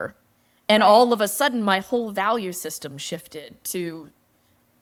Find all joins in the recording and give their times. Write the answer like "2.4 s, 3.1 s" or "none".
none

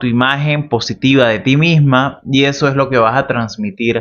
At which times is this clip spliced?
none

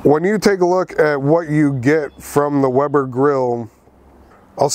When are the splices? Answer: 2.1 s

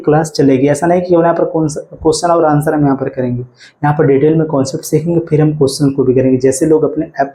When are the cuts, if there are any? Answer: none

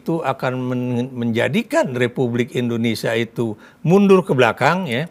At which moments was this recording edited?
none

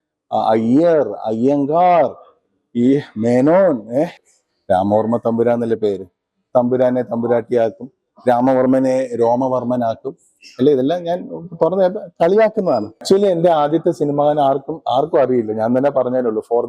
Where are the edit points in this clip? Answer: 4.2 s, 13.0 s

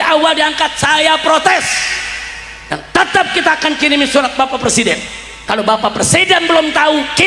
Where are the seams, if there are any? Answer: none

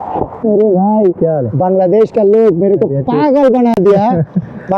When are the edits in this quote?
none

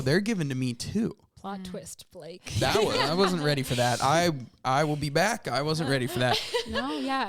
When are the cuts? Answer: none

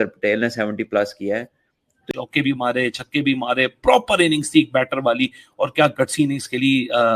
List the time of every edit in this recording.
2.0 s

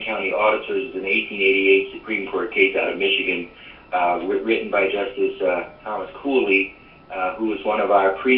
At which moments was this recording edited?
4.4 s

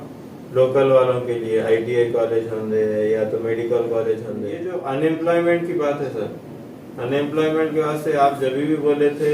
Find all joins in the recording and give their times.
4.7 s

